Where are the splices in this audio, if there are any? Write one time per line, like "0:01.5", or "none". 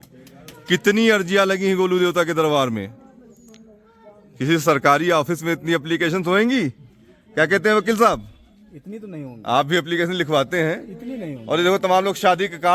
none